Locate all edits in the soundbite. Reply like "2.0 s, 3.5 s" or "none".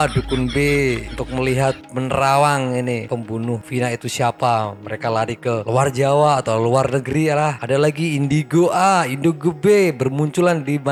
none